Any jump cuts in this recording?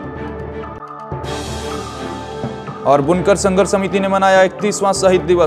yes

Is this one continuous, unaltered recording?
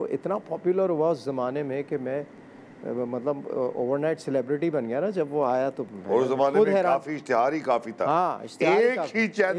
yes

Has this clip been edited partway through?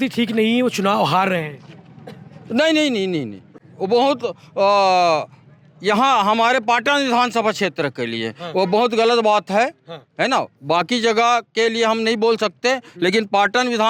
no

